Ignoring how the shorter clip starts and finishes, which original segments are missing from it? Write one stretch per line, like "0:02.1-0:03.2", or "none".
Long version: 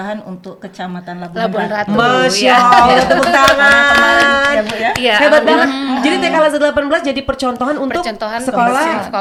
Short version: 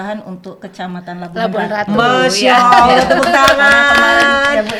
none